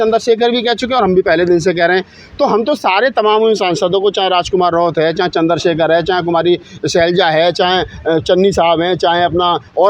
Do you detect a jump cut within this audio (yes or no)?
no